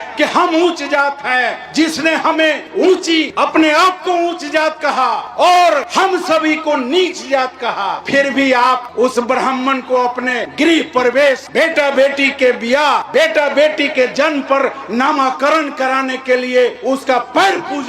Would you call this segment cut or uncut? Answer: cut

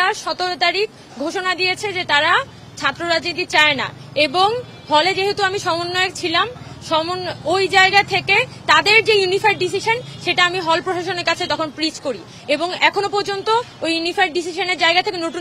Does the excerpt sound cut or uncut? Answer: uncut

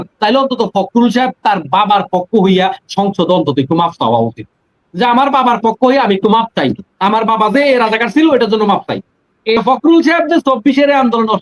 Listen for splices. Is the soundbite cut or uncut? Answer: cut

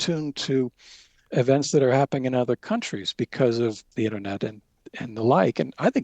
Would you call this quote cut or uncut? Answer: cut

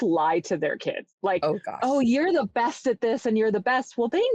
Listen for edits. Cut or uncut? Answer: cut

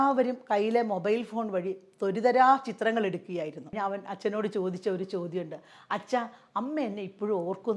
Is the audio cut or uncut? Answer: cut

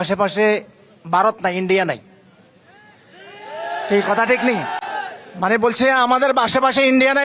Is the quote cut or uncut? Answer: uncut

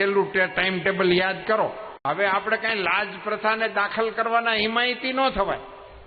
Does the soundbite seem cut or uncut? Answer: cut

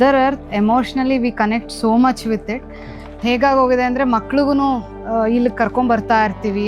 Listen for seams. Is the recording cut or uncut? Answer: cut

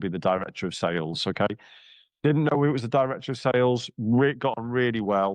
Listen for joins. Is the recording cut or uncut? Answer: uncut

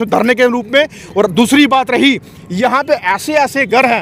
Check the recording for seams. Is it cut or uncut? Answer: uncut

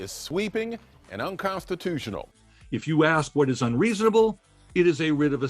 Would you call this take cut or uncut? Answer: cut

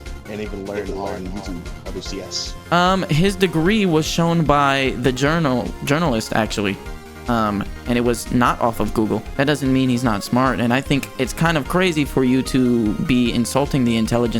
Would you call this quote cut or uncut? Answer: cut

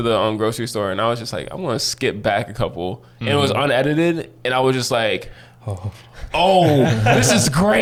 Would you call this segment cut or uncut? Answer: uncut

